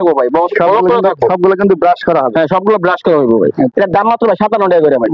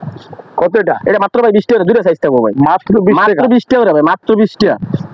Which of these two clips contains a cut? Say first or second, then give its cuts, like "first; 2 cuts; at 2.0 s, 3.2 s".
first; 1 cut; at 3.7 s